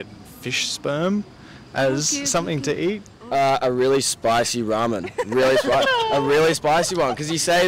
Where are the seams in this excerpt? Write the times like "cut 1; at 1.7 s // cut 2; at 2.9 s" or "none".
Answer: cut 1; at 3.1 s